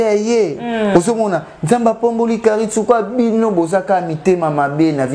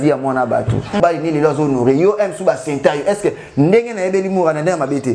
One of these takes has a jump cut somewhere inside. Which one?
second; 1 cut; at 1.0 s

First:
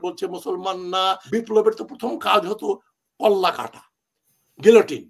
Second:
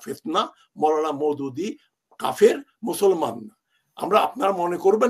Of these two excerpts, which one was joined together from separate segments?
first; 1 cut; at 1.2 s

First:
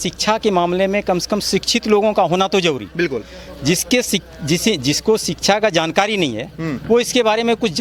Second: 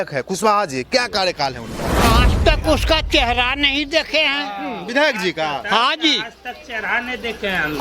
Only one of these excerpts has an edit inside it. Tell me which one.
second; 1 cut; at 2.0 s

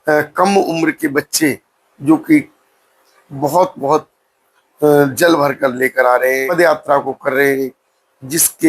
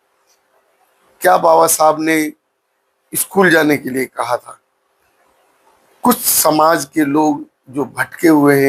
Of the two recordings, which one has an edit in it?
first; 1 cut; at 6.5 s

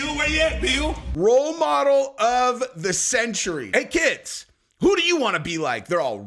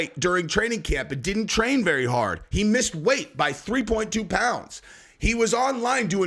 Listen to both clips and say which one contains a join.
first; 2 cuts; at 1.1 s, 3.7 s

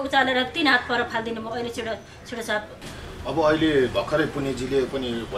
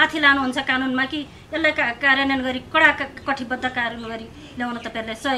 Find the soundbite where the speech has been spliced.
first; 1 cut; at 2.8 s

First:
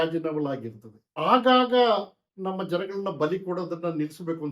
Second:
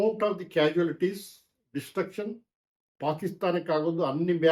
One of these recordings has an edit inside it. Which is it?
first; 2 cuts; at 1.0 s, 2.2 s

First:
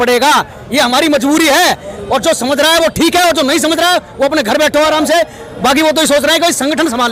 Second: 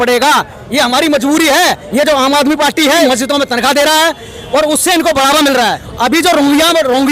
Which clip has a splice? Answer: second; 3 cuts; at 1.8 s, 3.1 s, 5.8 s

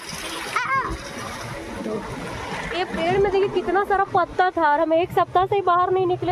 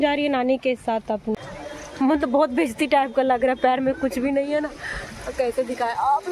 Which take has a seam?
second; 1 cut; at 1.5 s

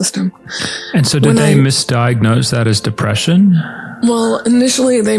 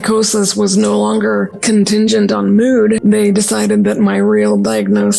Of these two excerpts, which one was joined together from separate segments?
second; 2 cuts; at 1.6 s, 3.0 s

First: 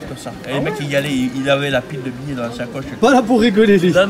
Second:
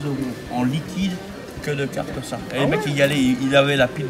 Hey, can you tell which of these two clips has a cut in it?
first; 1 cut; at 3.0 s

